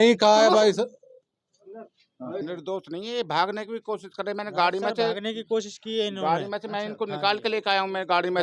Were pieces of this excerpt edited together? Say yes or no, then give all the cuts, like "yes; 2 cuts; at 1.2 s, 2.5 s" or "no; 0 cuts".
yes; 1 cut; at 2.4 s